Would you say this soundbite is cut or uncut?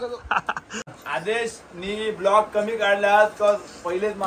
cut